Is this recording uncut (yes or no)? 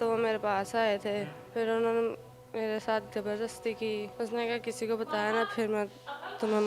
no